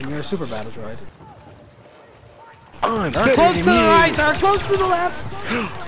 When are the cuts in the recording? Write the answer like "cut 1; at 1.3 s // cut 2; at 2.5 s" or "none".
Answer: none